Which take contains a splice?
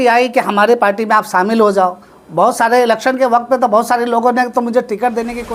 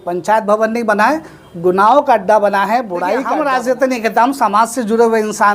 second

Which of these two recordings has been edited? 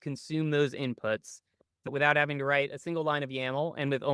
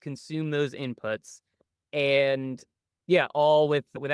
first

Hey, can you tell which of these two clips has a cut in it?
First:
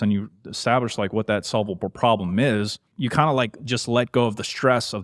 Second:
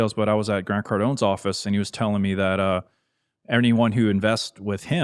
first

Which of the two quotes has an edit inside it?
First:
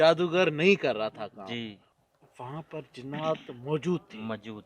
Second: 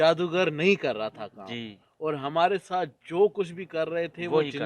first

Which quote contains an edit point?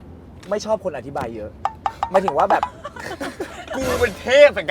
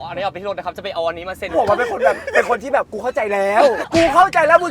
second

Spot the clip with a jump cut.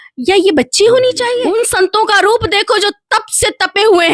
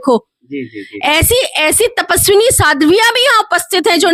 first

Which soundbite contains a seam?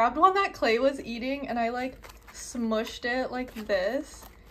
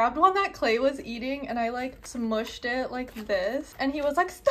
second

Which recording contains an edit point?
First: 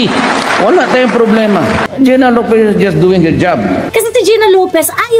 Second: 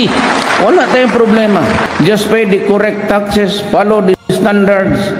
first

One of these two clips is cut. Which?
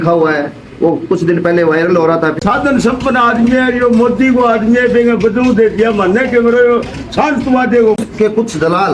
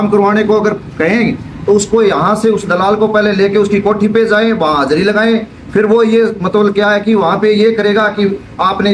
first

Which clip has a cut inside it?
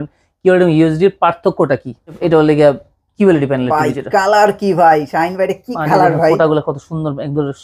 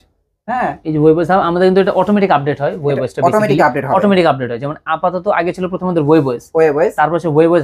first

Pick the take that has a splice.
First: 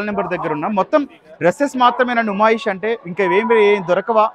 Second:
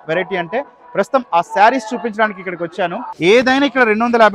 second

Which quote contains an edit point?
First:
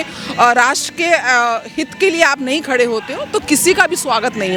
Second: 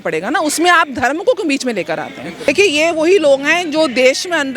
second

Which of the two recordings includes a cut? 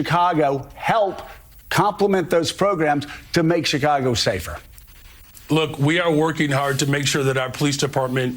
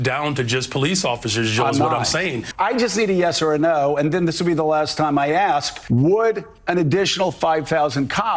second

